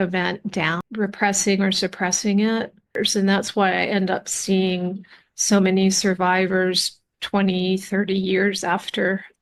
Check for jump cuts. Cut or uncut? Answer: cut